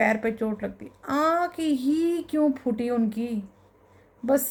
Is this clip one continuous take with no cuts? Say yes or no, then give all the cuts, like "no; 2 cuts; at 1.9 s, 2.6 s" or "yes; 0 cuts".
yes; 0 cuts